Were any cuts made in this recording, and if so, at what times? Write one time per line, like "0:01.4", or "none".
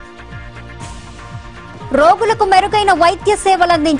0:01.3